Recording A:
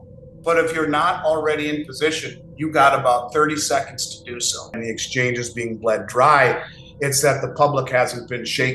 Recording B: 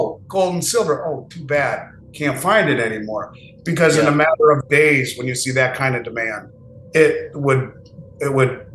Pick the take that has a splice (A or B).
A